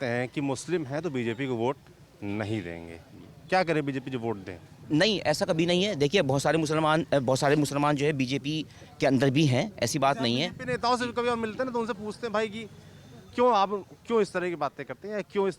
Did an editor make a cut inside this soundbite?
no; 0 cuts

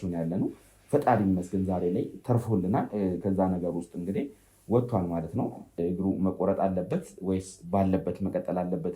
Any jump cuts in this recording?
yes; 1 cut; at 5.7 s

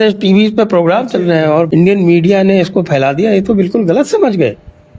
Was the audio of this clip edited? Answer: yes; 1 cut; at 1.7 s

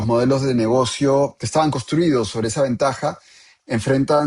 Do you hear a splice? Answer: yes; 1 cut; at 1.4 s

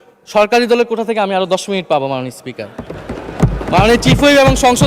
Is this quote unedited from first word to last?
yes; 0 cuts

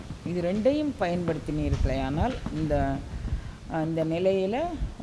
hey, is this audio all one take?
yes; 0 cuts

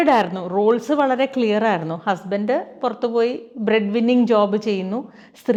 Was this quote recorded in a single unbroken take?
yes; 0 cuts

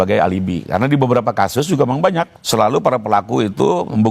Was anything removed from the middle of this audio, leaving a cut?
yes; 1 cut; at 2.3 s

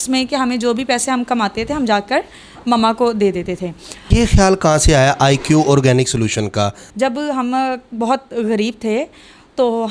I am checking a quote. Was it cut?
yes; 2 cuts; at 4.0 s, 6.8 s

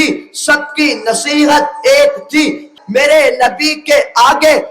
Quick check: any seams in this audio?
yes; 1 cut; at 2.7 s

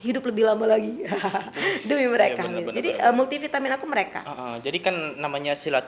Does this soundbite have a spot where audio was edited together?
no; 0 cuts

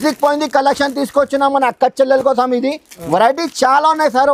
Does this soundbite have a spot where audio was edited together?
no; 0 cuts

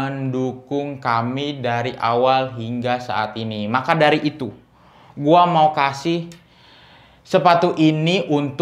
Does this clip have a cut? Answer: no; 0 cuts

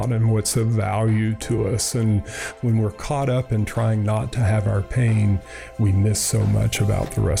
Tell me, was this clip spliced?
no; 0 cuts

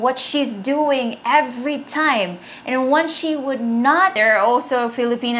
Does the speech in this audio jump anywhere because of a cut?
yes; 1 cut; at 4.1 s

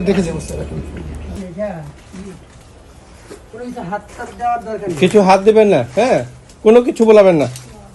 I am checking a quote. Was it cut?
yes; 1 cut; at 1.3 s

